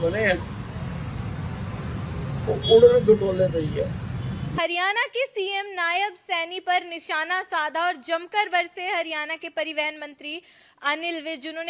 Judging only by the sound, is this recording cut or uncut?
cut